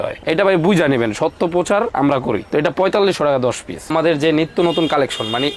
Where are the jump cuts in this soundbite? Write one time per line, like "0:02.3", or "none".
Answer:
0:03.9